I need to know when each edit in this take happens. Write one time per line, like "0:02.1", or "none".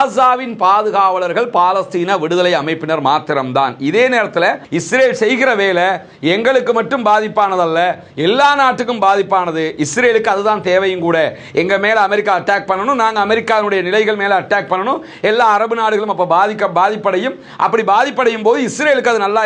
0:04.7